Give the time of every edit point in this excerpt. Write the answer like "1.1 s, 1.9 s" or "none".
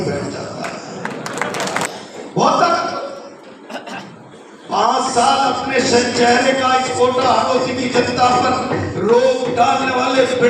1.9 s